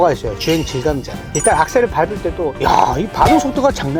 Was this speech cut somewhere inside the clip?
no; 0 cuts

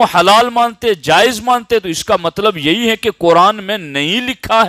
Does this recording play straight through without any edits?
yes; 0 cuts

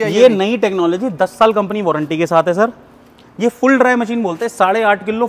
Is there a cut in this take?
no; 0 cuts

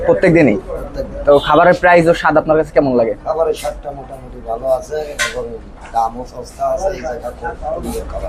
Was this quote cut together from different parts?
no; 0 cuts

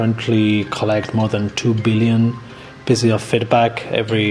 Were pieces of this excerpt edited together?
no; 0 cuts

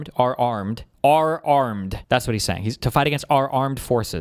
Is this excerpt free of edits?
yes; 0 cuts

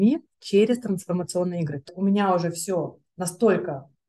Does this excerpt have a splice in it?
yes; 1 cut; at 1.8 s

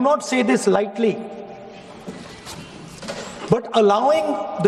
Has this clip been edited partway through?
no; 0 cuts

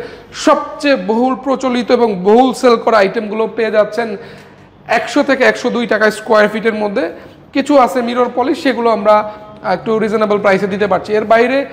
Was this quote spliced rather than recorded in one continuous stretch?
no; 0 cuts

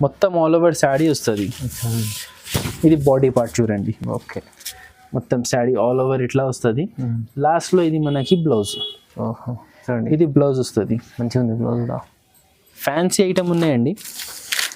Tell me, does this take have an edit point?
no; 0 cuts

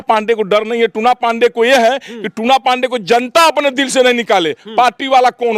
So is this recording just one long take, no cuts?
yes; 0 cuts

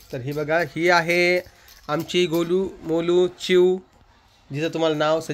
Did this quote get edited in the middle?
no; 0 cuts

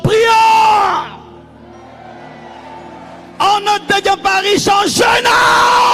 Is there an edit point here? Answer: no; 0 cuts

